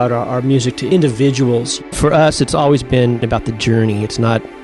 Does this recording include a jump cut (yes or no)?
yes